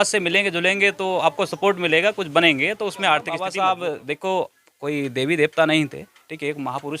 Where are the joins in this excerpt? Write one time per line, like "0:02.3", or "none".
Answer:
0:03.4